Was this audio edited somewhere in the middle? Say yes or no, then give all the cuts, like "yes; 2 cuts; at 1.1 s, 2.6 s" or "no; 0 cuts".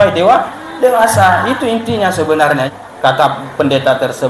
yes; 1 cut; at 2.7 s